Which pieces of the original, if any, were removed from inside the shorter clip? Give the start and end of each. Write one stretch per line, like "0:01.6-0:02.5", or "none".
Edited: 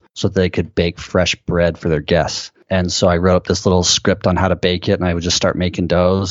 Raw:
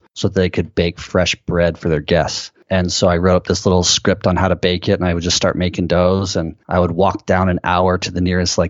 none